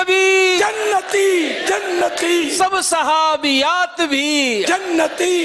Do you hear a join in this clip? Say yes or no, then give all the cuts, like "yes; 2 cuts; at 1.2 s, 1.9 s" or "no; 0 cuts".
no; 0 cuts